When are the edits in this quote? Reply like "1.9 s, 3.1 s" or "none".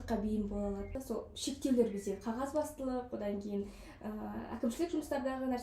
0.9 s